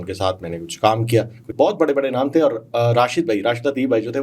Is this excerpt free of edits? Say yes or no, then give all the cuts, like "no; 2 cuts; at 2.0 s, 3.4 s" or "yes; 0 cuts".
no; 1 cut; at 1.5 s